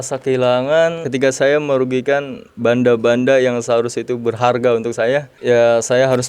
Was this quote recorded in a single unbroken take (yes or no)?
no